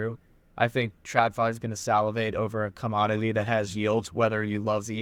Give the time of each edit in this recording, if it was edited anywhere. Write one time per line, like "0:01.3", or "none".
none